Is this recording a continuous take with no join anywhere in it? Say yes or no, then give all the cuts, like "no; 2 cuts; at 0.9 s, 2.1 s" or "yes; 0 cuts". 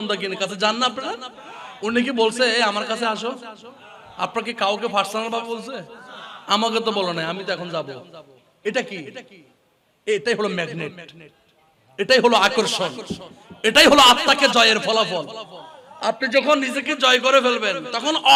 yes; 0 cuts